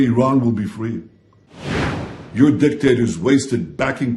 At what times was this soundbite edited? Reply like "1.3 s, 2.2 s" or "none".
1.8 s